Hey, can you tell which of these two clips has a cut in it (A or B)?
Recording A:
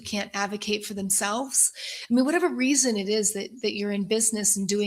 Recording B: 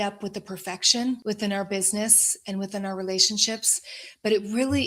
B